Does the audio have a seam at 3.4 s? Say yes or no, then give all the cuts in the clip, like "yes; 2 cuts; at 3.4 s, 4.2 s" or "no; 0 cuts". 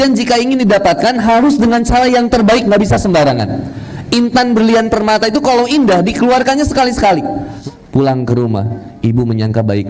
no; 1 cut; at 7.5 s